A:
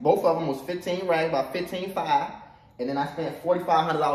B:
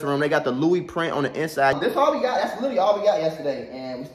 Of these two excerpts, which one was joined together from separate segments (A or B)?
B